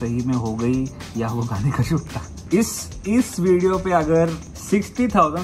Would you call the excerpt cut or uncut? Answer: cut